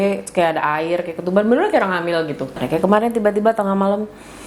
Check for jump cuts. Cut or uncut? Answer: cut